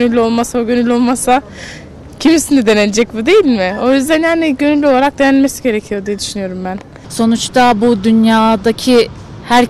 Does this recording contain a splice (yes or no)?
yes